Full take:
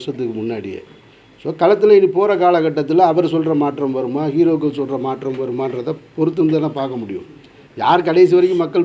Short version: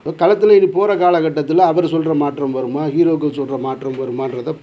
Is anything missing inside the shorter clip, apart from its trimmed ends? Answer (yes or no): no